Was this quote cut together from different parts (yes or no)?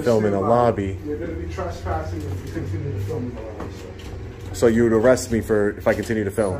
no